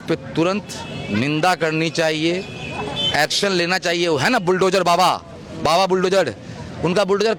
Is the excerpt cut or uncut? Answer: uncut